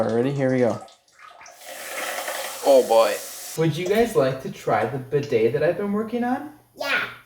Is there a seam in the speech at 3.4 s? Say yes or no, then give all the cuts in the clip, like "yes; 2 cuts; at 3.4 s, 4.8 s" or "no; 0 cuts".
yes; 1 cut; at 3.4 s